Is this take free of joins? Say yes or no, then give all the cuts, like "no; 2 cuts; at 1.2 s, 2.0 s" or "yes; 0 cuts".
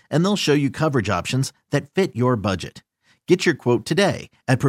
yes; 0 cuts